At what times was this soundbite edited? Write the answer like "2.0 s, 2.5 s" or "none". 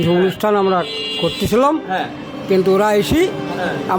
none